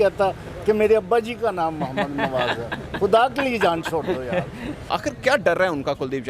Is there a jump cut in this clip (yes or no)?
yes